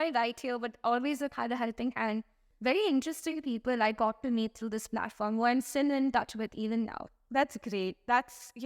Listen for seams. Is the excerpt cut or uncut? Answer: cut